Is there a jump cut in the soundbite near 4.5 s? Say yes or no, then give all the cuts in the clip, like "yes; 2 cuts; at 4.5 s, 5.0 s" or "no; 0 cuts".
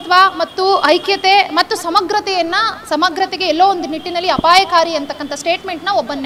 no; 0 cuts